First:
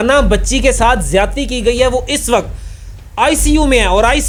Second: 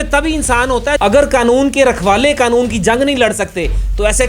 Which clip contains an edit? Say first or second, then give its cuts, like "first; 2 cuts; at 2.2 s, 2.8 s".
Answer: second; 1 cut; at 1.0 s